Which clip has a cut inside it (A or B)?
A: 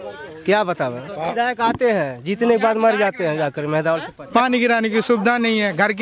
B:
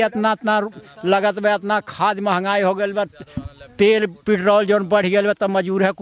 A